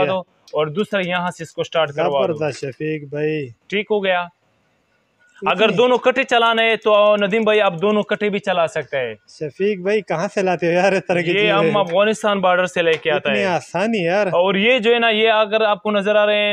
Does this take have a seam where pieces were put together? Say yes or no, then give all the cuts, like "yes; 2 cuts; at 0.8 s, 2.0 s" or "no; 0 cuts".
no; 0 cuts